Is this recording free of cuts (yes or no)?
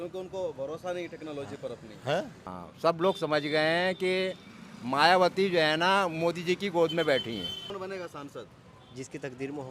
no